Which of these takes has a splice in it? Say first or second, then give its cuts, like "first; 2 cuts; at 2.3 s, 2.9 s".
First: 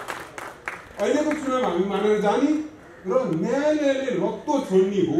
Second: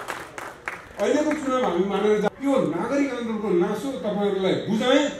second; 1 cut; at 2.3 s